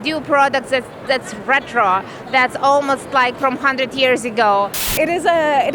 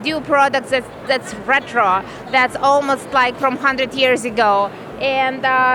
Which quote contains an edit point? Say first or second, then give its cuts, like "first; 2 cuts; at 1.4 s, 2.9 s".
first; 1 cut; at 4.8 s